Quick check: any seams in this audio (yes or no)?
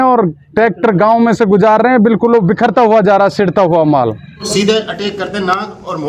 yes